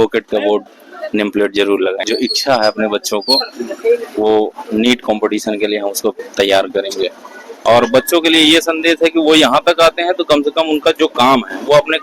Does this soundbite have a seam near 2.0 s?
yes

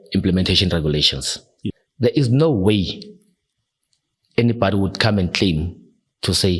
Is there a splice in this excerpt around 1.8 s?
yes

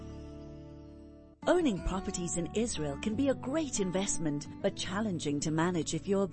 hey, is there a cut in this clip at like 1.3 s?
yes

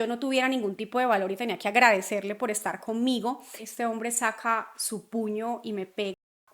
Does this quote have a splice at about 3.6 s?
yes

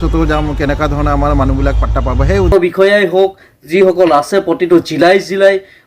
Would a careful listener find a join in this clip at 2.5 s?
yes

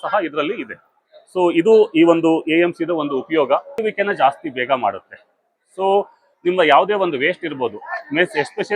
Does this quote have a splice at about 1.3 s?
no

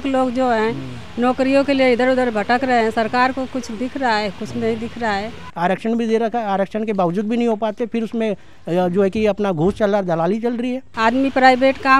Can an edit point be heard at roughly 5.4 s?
yes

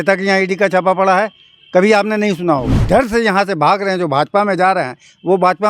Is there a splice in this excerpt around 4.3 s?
no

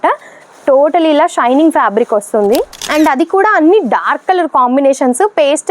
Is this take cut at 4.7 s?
no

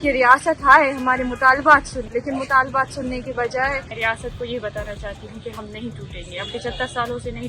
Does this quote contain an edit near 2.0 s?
yes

